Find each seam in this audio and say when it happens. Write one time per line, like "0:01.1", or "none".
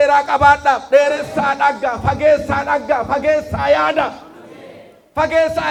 none